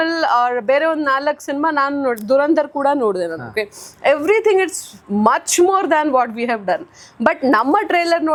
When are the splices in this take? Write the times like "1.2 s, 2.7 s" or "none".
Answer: none